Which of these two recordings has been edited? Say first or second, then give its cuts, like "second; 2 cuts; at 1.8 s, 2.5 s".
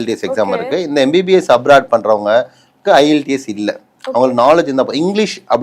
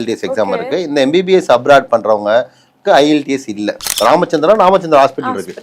second; 1 cut; at 3.9 s